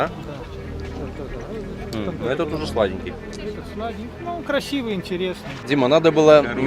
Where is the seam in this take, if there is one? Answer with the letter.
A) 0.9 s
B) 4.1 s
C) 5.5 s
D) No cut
C